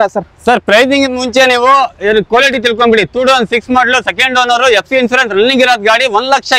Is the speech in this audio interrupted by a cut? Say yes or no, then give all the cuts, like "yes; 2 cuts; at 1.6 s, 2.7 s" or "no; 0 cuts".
no; 0 cuts